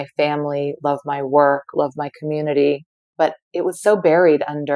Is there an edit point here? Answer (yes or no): yes